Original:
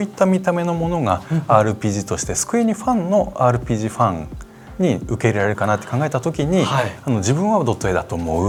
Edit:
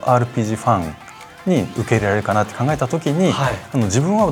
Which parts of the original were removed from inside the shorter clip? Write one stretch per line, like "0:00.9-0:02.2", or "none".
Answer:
none